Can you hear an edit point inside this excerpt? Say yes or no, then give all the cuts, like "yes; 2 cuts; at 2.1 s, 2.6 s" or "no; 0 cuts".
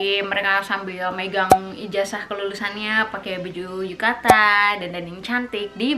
no; 0 cuts